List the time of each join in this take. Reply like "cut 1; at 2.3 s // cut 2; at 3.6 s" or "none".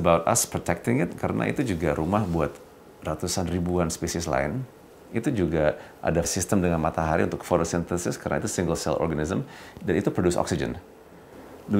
cut 1; at 6.3 s